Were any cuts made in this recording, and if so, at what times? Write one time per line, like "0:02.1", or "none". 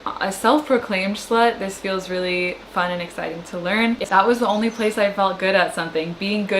0:04.0